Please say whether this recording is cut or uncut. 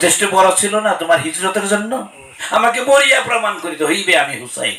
cut